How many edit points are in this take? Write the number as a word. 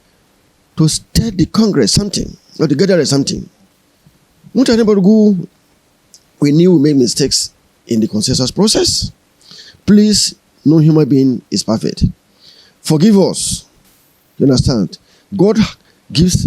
zero